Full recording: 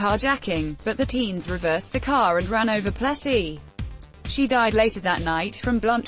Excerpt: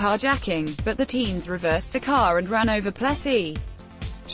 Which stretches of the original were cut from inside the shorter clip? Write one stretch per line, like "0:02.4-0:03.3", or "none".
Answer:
none